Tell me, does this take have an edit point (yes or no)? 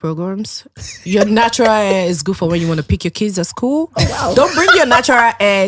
no